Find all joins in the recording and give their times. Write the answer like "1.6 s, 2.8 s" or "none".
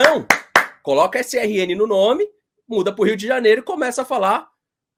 none